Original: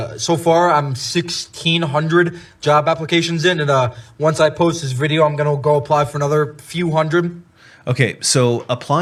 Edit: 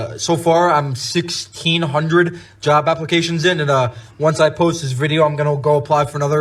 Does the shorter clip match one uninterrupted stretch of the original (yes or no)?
yes